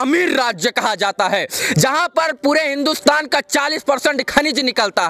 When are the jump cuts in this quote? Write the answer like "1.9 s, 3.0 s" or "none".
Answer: none